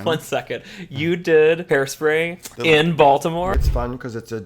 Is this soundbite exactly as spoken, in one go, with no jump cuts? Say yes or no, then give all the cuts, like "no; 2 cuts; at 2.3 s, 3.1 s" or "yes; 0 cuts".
no; 2 cuts; at 2.1 s, 3.5 s